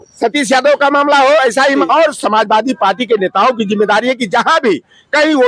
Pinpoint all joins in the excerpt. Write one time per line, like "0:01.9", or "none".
0:01.8